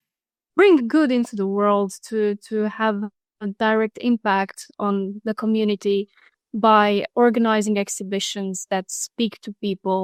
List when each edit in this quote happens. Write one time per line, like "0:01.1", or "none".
none